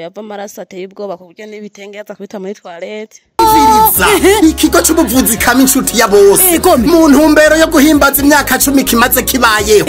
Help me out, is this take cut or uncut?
cut